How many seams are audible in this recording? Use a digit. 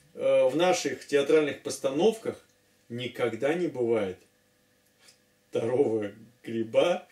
0